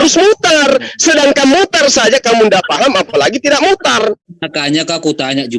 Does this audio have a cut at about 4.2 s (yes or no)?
yes